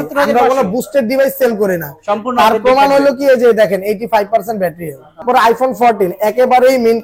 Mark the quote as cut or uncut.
cut